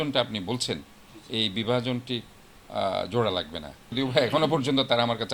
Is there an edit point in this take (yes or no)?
yes